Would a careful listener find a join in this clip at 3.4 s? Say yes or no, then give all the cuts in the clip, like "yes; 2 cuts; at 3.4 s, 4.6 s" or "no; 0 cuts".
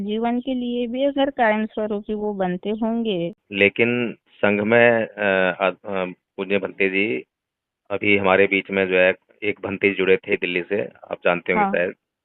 yes; 2 cuts; at 3.4 s, 10.3 s